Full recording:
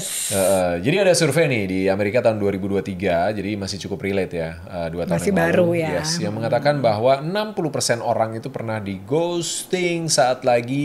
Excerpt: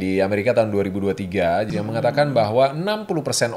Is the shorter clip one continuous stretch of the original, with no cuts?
no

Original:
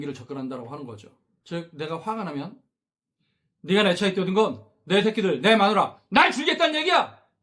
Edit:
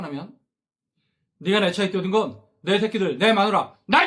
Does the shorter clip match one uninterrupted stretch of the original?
yes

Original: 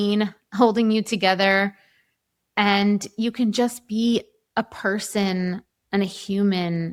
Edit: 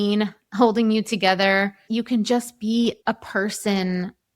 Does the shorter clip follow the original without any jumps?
no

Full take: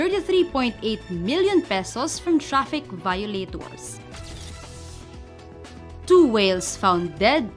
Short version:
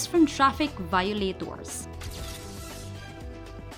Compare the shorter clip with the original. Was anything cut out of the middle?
no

